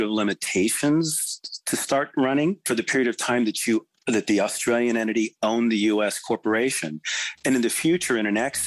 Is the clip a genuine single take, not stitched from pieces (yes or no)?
no